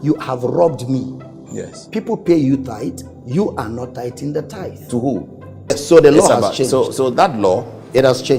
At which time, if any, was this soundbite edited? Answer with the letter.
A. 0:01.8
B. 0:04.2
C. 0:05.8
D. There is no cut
C